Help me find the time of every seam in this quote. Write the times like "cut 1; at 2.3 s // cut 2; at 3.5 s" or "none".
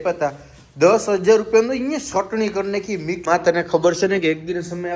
cut 1; at 3.2 s